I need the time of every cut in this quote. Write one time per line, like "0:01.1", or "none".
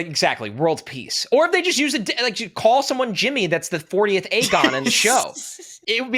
none